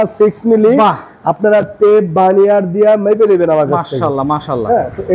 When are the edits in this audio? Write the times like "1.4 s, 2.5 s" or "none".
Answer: none